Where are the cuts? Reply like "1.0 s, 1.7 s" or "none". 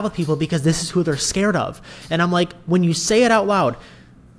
none